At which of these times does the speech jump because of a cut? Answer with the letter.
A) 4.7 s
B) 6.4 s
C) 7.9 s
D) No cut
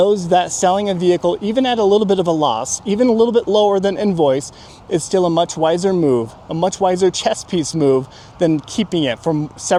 D